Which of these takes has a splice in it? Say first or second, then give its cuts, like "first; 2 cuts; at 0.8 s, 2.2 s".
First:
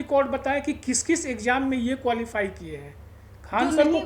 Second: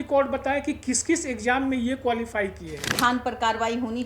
second; 1 cut; at 2.8 s